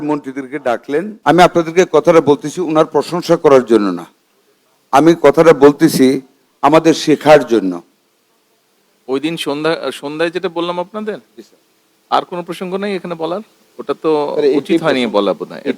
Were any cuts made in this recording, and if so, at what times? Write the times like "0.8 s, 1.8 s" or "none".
1.1 s